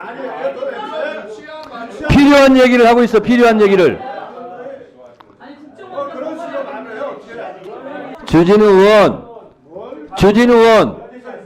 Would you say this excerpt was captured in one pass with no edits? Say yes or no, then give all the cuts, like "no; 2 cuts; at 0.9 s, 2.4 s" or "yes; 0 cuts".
no; 1 cut; at 8.2 s